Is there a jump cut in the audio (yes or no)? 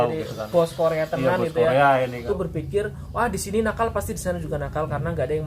yes